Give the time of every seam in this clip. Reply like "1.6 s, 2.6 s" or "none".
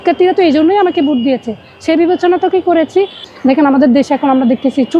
3.2 s